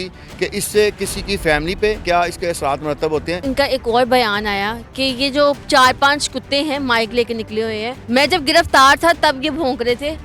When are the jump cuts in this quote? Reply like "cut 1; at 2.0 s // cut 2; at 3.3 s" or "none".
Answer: cut 1; at 2.0 s // cut 2; at 3.4 s // cut 3; at 8.0 s